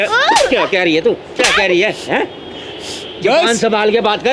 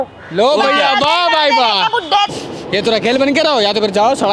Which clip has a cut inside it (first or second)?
second